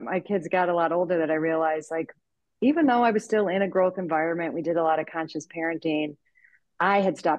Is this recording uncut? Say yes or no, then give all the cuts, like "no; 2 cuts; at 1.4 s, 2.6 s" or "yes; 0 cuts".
yes; 0 cuts